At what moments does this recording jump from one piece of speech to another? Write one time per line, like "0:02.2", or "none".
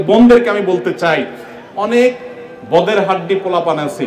none